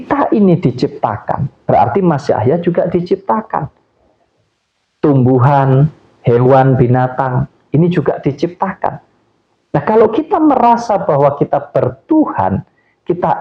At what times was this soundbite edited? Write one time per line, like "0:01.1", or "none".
none